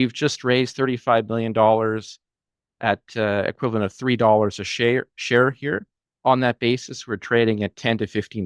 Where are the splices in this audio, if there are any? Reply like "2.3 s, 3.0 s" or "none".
none

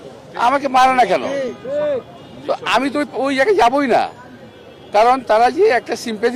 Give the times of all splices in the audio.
none

